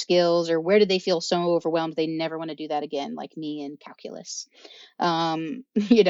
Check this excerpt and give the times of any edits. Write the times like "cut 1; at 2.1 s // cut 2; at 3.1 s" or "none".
none